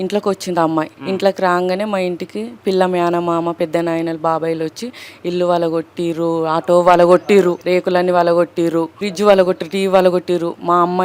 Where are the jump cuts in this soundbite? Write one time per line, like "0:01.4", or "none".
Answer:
0:01.0
0:07.6
0:09.0